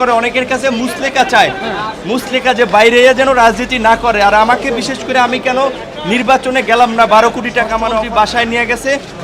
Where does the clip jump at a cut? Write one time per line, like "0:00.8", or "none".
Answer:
0:07.9